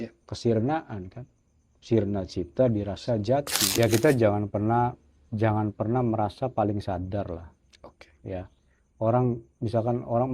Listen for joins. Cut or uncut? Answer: cut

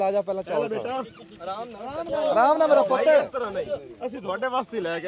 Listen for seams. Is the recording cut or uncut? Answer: uncut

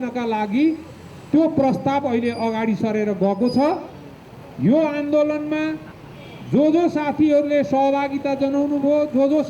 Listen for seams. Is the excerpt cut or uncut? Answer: uncut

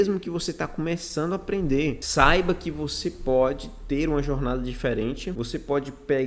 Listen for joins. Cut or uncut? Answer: cut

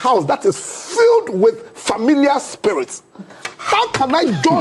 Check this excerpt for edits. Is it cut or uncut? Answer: uncut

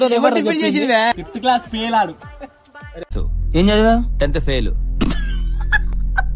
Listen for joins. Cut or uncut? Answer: cut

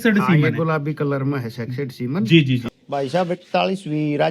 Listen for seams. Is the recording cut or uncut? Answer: cut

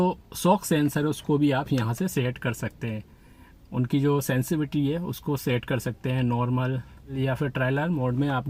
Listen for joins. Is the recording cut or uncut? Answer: uncut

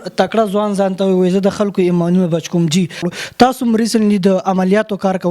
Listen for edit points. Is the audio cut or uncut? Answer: cut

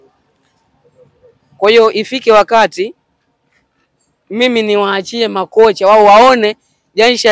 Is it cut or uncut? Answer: uncut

